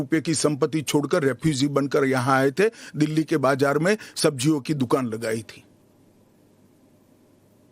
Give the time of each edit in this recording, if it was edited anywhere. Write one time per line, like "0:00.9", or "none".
0:02.8